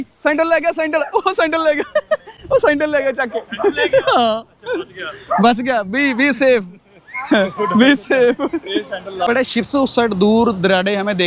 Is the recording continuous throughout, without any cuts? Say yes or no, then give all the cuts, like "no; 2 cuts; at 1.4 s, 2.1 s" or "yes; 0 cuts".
yes; 0 cuts